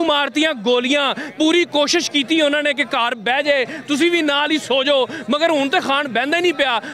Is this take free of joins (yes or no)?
yes